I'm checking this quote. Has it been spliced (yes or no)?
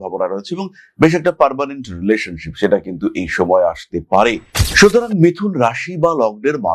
yes